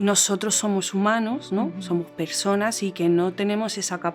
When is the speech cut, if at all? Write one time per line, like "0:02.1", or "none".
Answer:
none